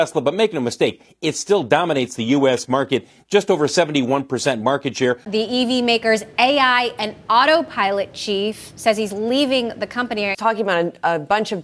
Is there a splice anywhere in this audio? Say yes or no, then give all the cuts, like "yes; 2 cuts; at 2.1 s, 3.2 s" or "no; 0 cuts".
yes; 2 cuts; at 5.2 s, 10.3 s